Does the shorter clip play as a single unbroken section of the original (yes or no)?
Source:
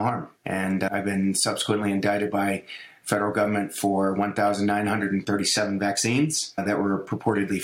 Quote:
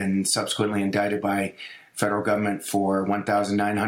yes